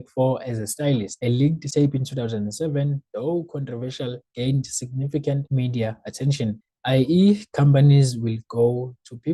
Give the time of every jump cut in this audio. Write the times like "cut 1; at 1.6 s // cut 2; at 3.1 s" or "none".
cut 1; at 6.6 s